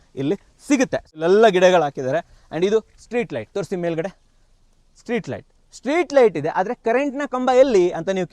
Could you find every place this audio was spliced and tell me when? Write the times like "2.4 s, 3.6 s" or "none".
1.1 s